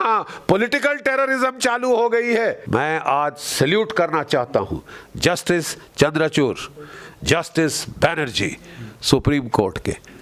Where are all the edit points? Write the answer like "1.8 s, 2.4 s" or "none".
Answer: 2.6 s